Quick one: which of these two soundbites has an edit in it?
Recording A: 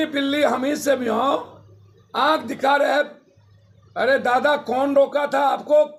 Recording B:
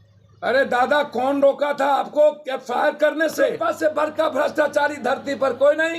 B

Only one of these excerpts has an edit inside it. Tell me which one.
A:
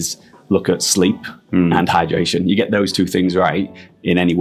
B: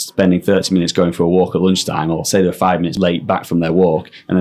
B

